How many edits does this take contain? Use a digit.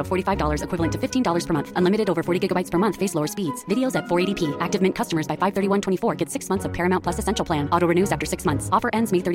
0